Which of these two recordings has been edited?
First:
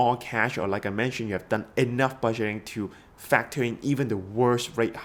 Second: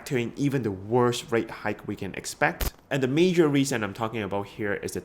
second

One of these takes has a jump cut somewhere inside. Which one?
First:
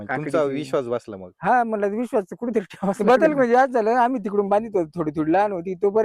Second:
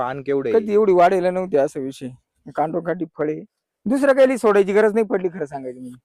first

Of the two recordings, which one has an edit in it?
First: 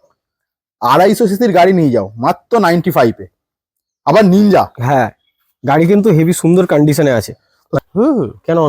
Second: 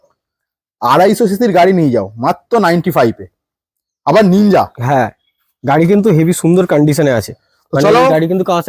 first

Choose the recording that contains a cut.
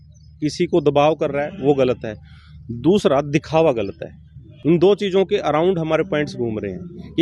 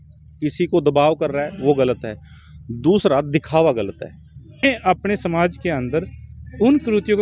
second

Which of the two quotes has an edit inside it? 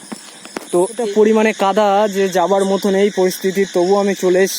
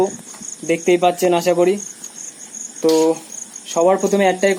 first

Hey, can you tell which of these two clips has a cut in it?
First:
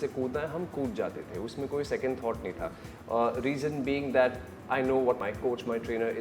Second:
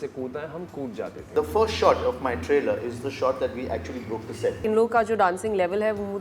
second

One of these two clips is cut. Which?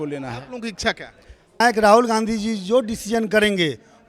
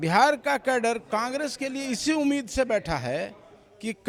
first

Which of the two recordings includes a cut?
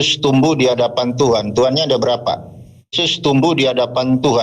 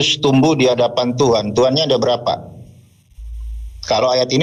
first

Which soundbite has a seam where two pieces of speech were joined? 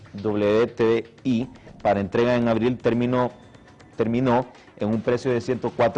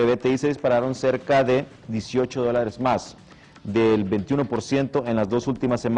first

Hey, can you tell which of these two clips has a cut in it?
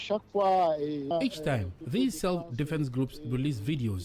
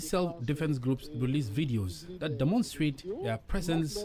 first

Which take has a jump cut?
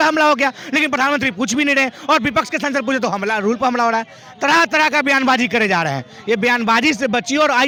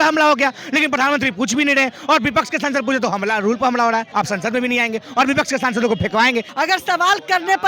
second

